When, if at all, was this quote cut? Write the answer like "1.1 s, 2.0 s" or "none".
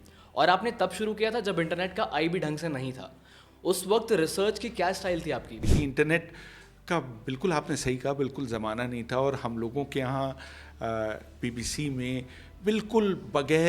5.7 s

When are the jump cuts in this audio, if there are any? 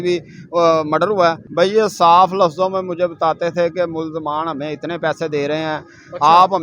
1.4 s

